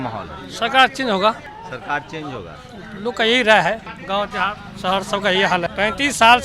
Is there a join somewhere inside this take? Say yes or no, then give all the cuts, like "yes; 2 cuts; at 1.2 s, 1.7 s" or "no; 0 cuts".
yes; 3 cuts; at 1.5 s, 3.9 s, 5.7 s